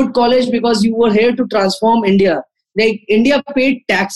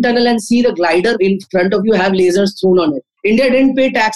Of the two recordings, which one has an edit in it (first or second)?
second